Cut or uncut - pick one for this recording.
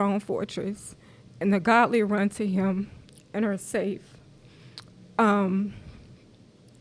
uncut